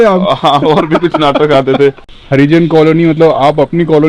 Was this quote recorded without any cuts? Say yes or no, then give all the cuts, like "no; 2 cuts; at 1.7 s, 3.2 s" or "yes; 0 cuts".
no; 1 cut; at 2.1 s